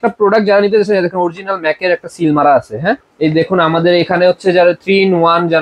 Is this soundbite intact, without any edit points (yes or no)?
no